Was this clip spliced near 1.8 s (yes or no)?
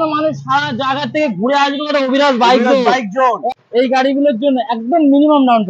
no